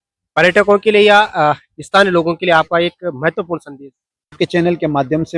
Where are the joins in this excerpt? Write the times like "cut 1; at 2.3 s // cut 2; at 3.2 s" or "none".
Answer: cut 1; at 4.4 s